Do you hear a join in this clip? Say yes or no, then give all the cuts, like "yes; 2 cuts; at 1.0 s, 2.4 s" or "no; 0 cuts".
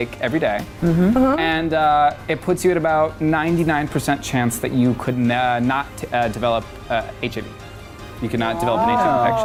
no; 0 cuts